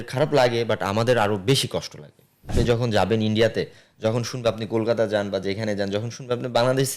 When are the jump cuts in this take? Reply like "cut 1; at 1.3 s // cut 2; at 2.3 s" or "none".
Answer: cut 1; at 2.6 s